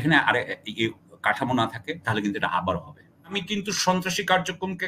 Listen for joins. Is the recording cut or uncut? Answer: cut